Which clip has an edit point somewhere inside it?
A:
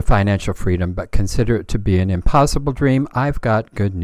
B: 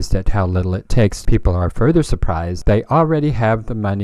B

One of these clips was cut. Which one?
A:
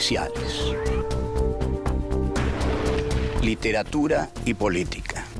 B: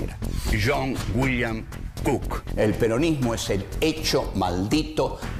B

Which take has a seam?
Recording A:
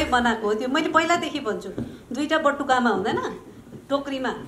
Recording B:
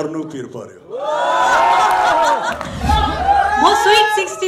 B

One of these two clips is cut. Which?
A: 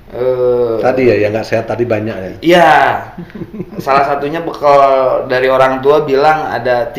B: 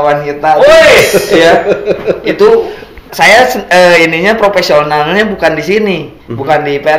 B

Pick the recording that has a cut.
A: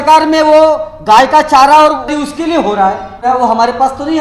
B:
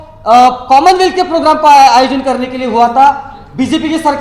A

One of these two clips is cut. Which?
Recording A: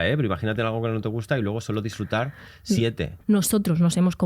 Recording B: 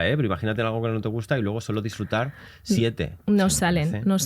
A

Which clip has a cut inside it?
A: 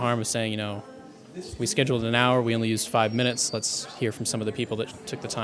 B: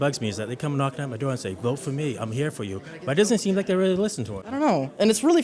B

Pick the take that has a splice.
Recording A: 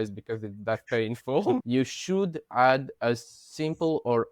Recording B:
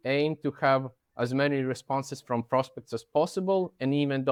A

